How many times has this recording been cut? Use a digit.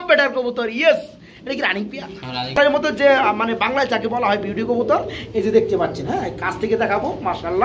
1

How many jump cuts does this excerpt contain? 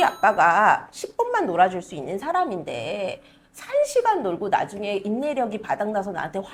0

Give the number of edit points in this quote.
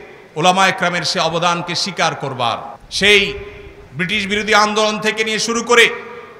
1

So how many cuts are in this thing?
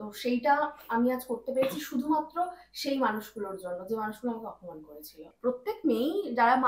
1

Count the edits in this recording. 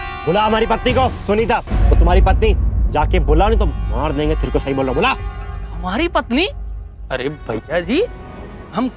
1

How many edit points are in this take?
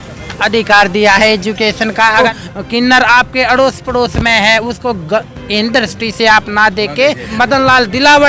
2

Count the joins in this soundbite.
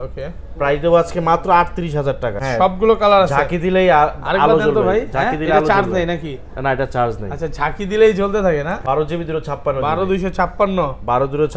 2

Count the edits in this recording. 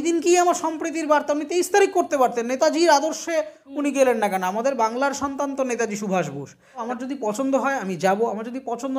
1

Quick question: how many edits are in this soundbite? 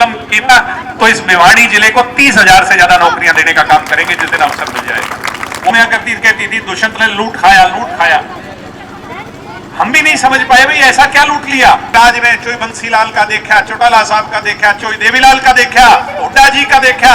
2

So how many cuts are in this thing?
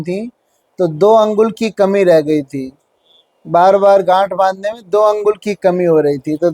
0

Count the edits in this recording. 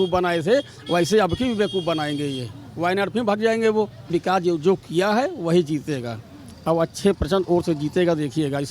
1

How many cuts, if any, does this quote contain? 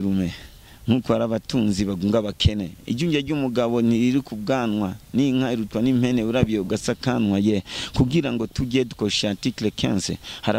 0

